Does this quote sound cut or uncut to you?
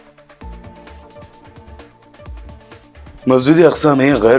uncut